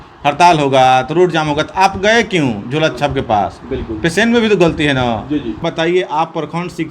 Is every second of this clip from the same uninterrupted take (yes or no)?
no